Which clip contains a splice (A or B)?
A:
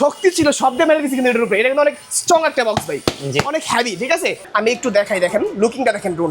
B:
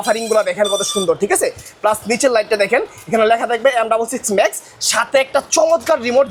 A